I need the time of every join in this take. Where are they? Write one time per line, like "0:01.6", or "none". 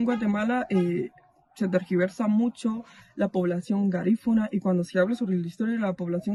none